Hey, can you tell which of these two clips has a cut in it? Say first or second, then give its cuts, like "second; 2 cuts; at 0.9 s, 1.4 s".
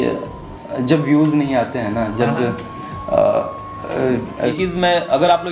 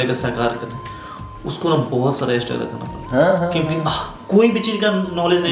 first; 1 cut; at 4.5 s